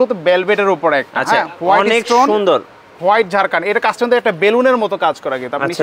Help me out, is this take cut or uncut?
uncut